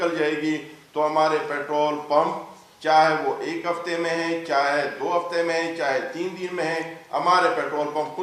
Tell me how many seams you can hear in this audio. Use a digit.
0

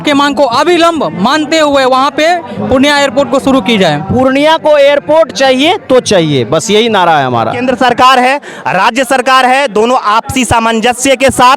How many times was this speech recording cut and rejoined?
2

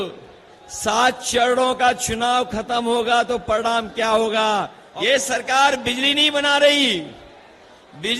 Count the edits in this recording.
1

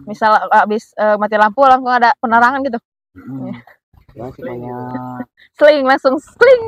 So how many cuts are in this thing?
0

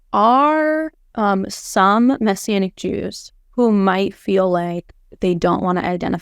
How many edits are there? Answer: 0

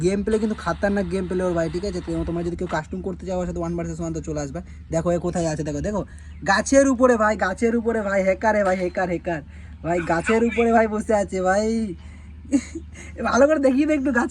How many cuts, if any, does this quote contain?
0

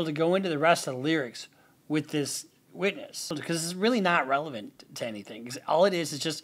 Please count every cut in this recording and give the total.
1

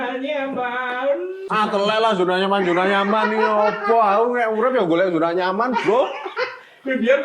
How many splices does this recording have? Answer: 1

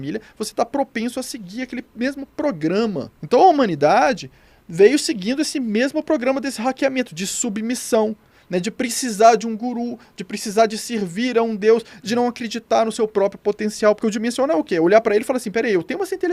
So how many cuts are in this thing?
1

